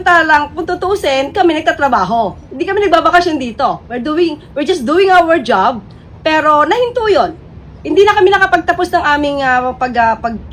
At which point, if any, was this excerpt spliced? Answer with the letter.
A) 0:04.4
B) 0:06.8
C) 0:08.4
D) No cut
B